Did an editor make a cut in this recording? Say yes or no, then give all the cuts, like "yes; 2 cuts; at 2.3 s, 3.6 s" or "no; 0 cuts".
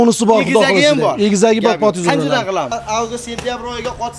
yes; 1 cut; at 2.8 s